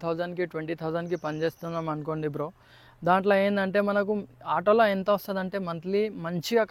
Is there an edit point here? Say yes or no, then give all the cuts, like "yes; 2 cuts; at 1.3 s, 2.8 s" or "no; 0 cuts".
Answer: no; 0 cuts